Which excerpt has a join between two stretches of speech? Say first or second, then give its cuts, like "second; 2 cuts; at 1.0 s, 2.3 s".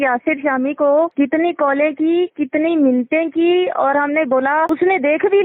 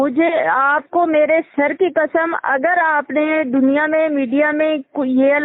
first; 2 cuts; at 1.1 s, 4.7 s